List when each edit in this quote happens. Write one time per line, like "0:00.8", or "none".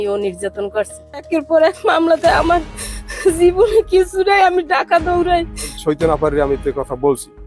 0:01.3
0:05.8

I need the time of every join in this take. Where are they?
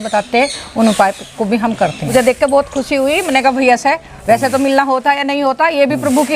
0:02.1

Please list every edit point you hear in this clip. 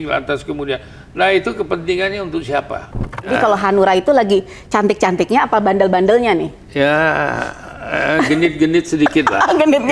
0:03.3

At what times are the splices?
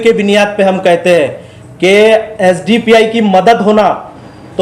none

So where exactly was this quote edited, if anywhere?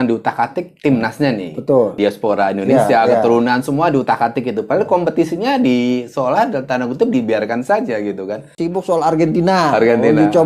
0:02.0
0:08.6

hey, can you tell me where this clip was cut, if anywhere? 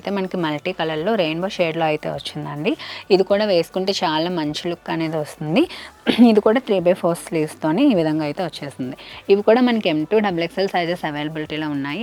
none

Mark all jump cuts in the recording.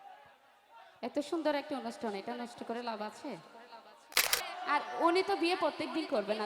0:04.2

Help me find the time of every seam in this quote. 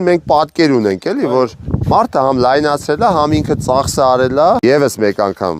0:04.6

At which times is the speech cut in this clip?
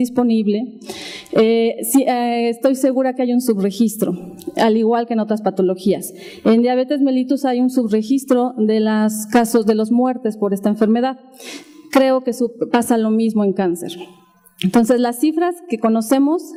none

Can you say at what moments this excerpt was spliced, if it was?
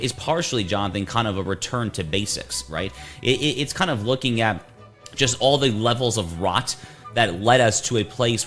none

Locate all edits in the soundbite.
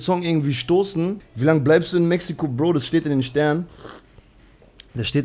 0:01.3

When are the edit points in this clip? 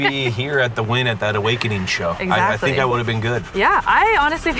0:02.2
0:03.5

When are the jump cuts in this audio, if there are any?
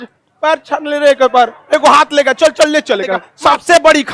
0:03.2

